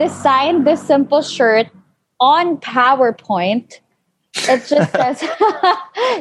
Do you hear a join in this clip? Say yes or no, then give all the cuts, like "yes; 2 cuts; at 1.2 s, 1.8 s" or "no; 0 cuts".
no; 0 cuts